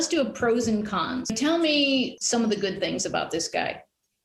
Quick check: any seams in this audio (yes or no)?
yes